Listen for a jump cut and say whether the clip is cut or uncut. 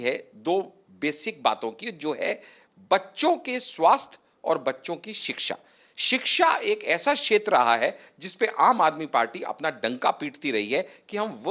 uncut